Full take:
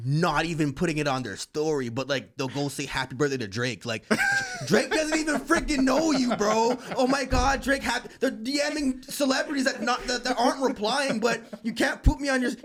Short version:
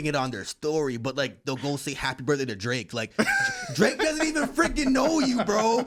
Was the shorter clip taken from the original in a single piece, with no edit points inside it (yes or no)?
yes